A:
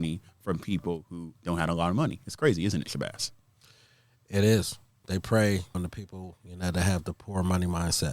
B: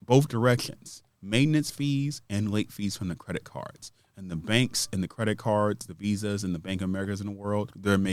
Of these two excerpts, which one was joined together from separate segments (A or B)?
A